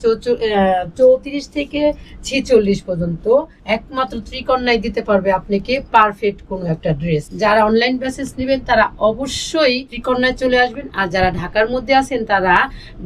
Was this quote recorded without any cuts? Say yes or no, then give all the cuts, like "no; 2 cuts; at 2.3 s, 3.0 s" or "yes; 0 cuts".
no; 3 cuts; at 3.6 s, 7.3 s, 9.9 s